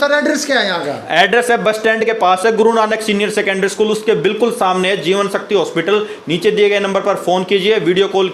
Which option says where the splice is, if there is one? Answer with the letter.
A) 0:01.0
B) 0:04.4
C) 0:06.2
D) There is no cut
A